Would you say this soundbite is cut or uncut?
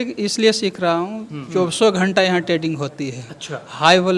cut